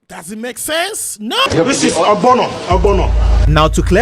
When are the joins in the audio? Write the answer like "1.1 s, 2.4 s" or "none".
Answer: 1.5 s